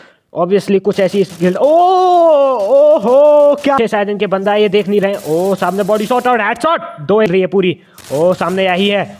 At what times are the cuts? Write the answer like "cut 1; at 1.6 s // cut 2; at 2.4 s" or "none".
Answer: cut 1; at 3.8 s // cut 2; at 7.3 s